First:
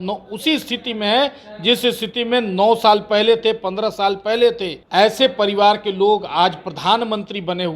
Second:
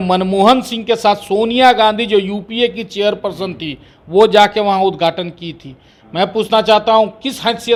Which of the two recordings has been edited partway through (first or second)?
first